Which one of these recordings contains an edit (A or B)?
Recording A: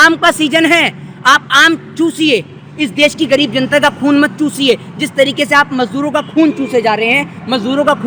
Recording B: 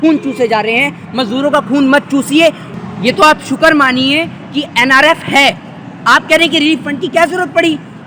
B